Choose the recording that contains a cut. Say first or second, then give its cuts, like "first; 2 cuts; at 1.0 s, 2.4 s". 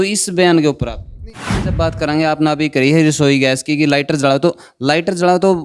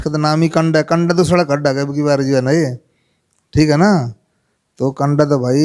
first; 1 cut; at 1.5 s